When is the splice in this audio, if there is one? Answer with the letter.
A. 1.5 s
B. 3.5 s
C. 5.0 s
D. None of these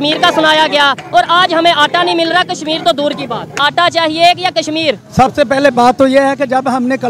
B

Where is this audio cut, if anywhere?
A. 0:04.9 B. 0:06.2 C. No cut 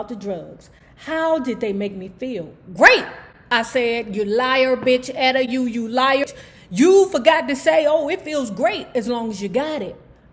B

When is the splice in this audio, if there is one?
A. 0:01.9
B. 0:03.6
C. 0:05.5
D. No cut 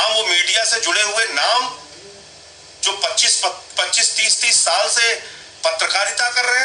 D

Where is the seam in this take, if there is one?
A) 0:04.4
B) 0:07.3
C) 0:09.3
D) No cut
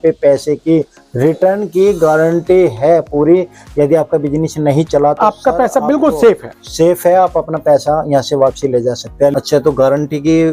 C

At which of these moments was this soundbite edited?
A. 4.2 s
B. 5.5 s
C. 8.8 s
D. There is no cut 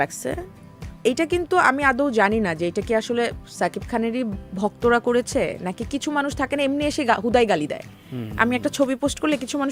D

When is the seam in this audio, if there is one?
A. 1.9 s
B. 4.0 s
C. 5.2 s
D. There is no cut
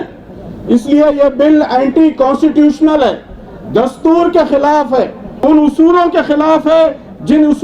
C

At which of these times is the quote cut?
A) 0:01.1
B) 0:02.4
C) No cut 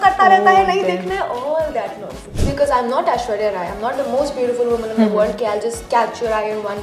B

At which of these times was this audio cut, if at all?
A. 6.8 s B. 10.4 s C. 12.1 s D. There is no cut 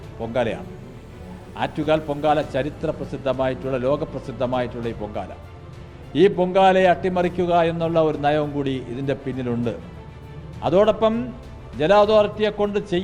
D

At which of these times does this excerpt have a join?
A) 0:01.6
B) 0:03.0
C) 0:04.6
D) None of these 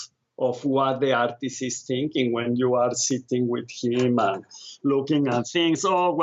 D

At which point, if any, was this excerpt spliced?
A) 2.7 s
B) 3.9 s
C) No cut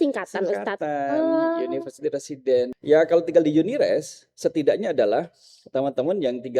A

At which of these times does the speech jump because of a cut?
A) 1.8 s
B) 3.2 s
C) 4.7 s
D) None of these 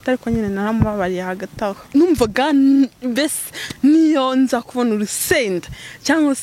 A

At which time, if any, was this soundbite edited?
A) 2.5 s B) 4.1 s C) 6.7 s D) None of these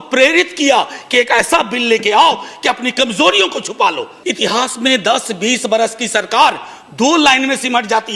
B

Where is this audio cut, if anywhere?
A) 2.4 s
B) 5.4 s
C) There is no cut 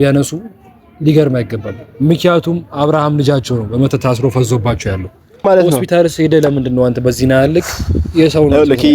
B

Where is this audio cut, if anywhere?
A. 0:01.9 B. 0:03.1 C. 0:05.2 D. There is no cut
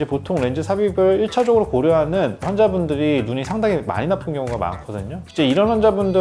C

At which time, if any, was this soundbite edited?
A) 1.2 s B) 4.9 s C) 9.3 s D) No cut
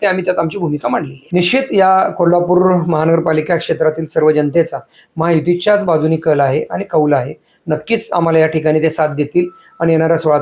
A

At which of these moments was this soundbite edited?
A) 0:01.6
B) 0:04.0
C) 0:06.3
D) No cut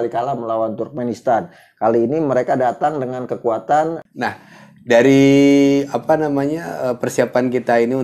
B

